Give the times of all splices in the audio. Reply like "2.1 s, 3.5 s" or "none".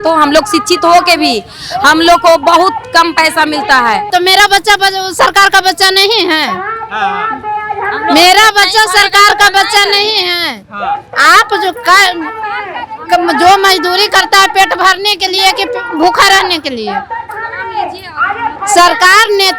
4.1 s